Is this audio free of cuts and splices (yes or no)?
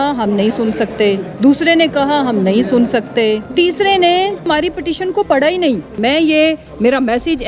no